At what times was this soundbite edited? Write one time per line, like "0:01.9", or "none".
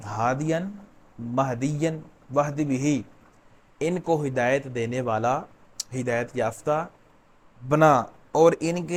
none